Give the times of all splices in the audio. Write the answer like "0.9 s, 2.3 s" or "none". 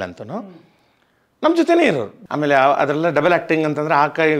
2.2 s